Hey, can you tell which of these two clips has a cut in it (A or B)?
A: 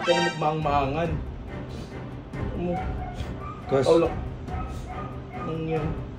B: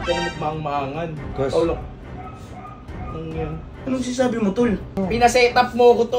B